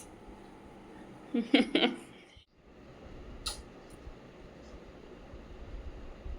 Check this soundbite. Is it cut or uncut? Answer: cut